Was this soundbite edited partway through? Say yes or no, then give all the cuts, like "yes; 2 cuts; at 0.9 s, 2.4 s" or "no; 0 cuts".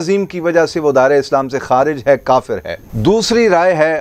no; 0 cuts